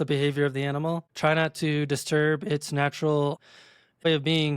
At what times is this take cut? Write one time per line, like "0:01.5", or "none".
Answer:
0:01.1
0:03.6